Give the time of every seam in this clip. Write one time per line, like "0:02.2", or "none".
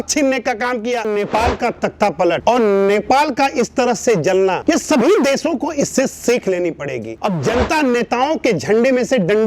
0:01.1
0:07.1